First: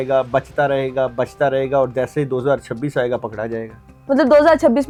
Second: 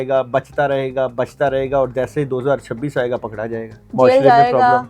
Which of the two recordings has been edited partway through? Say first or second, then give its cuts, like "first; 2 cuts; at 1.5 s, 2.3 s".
second; 1 cut; at 3.8 s